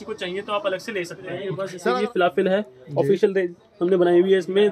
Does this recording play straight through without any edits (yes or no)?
no